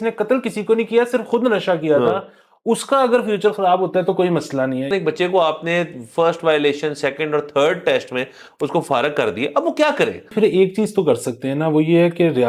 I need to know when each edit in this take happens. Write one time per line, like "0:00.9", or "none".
0:04.9
0:10.3